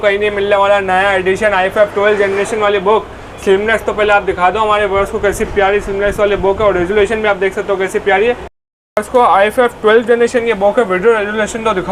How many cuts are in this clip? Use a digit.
0